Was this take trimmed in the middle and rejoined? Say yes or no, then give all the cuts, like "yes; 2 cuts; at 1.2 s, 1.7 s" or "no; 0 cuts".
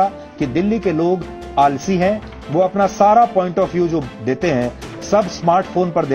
no; 0 cuts